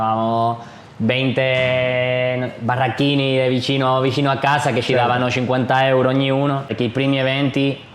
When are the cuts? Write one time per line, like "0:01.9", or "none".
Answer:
0:06.7